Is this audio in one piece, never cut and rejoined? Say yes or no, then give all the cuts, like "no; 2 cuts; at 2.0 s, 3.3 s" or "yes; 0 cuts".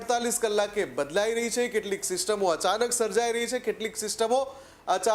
yes; 0 cuts